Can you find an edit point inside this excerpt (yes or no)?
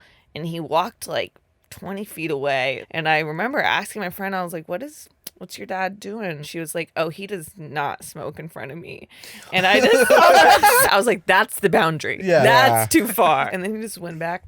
yes